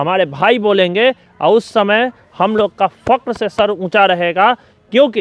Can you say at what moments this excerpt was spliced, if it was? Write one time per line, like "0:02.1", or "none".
none